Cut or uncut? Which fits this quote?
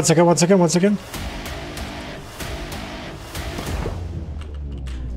uncut